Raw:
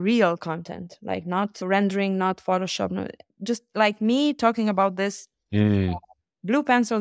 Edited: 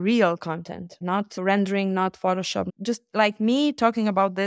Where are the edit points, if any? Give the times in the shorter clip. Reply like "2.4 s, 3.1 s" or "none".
0.9 s, 2.7 s